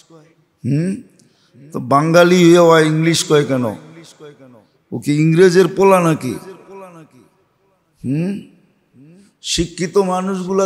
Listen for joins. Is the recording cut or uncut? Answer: uncut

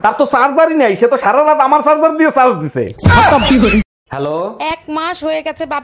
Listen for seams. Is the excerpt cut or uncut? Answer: cut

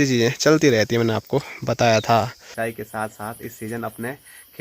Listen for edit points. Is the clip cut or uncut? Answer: cut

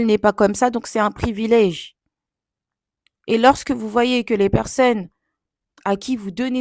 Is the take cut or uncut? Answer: uncut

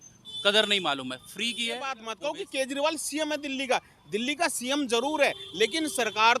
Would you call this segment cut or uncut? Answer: cut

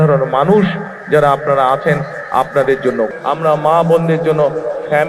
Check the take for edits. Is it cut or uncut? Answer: cut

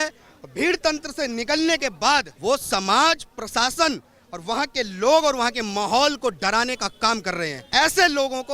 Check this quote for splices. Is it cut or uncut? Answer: cut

